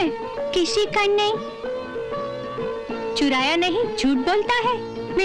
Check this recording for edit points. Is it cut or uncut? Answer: uncut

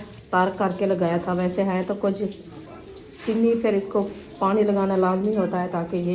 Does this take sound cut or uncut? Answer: uncut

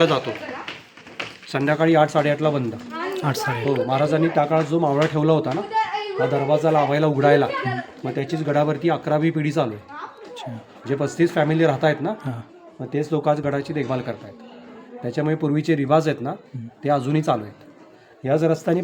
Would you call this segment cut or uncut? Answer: uncut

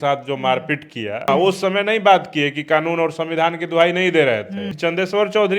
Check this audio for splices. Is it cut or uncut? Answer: cut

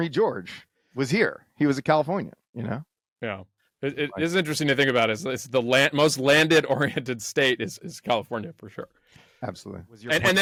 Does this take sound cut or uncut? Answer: uncut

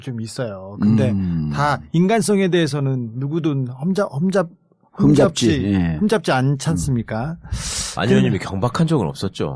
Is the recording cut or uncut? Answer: cut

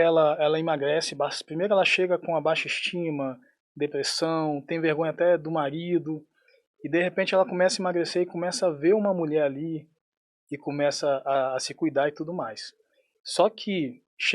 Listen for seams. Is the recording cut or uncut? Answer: uncut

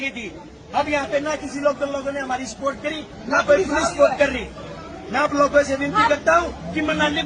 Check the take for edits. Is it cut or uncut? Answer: uncut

